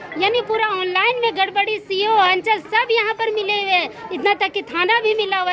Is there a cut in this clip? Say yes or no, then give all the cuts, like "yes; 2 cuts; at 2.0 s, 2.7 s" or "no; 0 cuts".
no; 0 cuts